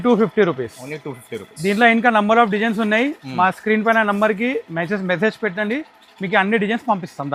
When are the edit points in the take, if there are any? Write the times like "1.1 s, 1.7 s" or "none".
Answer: none

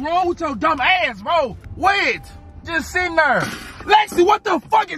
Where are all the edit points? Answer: 1.6 s

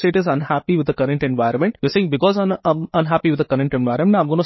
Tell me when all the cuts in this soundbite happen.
1.8 s

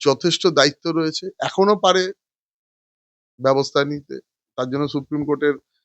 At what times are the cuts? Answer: none

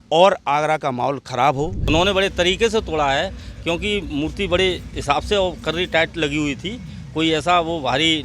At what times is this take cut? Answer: 1.8 s

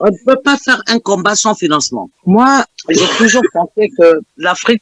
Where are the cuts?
2.1 s

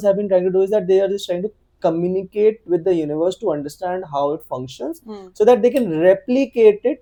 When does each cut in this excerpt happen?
none

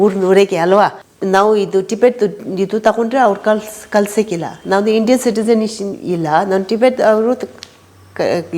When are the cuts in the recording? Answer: 1.1 s

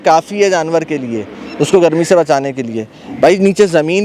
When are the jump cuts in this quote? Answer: none

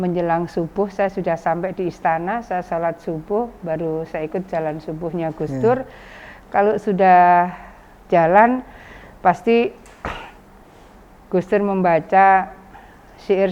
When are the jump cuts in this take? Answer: none

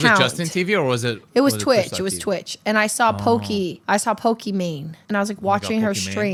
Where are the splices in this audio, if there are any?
none

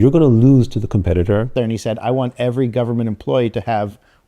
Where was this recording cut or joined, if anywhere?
1.5 s

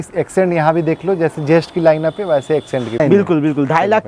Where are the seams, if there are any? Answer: 3.0 s

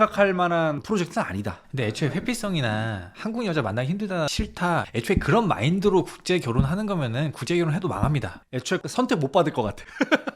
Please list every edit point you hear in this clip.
4.7 s, 8.8 s

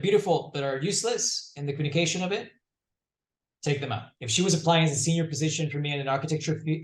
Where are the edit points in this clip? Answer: 4.1 s

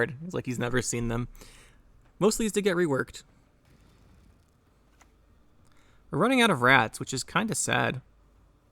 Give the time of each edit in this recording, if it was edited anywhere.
3.7 s

